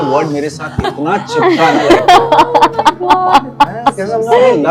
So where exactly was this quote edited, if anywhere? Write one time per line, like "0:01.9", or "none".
none

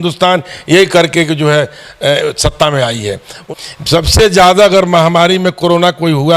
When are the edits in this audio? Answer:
0:03.4

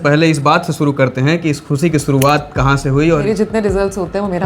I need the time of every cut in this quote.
0:03.2

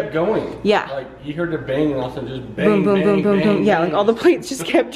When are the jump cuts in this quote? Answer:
none

